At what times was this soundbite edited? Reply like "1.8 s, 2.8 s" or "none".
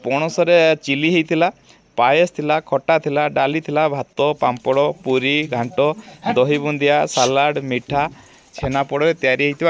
8.5 s